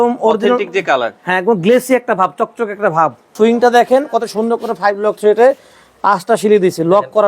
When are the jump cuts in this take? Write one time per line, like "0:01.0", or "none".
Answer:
0:03.3